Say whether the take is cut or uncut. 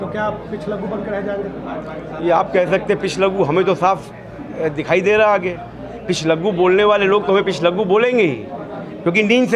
uncut